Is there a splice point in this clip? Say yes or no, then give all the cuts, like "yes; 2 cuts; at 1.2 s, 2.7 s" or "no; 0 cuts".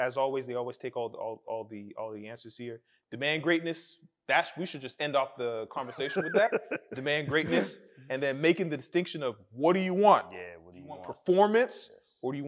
no; 0 cuts